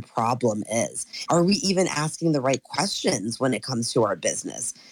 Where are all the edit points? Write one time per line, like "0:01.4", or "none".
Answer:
0:01.1